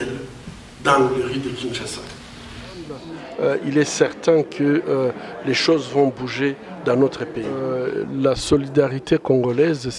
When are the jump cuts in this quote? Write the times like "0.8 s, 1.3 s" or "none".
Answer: 3.1 s, 7.7 s